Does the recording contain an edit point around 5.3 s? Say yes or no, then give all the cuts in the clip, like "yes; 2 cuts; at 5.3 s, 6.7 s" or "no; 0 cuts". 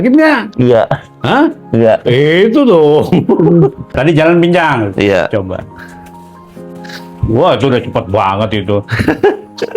no; 1 cut; at 4.0 s